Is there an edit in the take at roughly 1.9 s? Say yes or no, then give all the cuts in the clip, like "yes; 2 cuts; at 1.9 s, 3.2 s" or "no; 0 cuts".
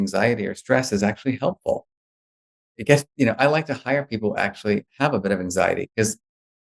no; 0 cuts